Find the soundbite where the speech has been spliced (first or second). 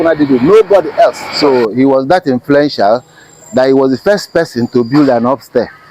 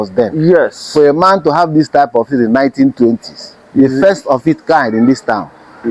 first